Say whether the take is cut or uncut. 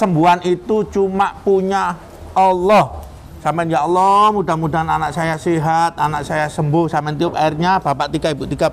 uncut